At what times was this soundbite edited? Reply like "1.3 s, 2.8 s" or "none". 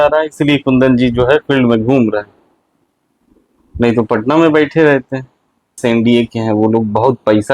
5.8 s